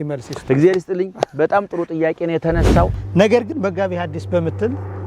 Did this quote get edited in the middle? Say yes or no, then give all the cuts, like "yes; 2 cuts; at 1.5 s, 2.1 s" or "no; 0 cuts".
yes; 1 cut; at 3.0 s